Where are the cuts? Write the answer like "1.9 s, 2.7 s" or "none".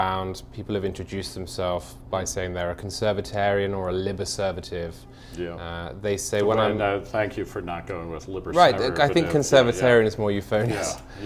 9.8 s